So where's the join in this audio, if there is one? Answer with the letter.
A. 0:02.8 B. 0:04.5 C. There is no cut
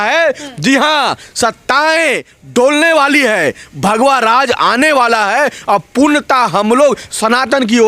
C